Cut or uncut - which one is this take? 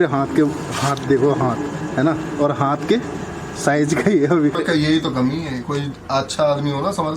cut